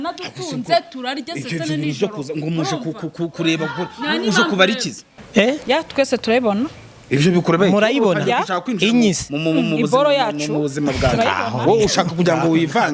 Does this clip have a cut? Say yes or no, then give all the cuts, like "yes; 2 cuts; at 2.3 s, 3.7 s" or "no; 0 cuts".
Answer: yes; 1 cut; at 5.1 s